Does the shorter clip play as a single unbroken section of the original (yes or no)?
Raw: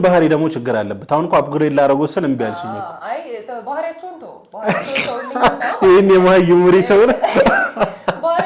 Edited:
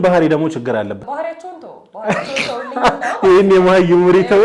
no